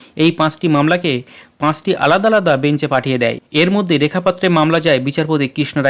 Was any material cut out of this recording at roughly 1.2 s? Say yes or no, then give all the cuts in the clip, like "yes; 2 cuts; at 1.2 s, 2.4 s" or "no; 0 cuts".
no; 1 cut; at 3.4 s